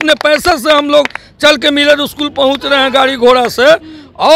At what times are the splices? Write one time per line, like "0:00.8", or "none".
none